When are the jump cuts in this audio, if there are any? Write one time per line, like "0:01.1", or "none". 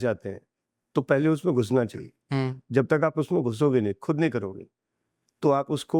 none